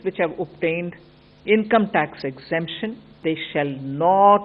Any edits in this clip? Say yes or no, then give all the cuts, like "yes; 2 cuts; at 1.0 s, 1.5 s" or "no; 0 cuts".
yes; 1 cut; at 3.2 s